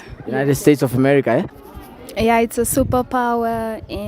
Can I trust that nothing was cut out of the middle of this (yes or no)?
no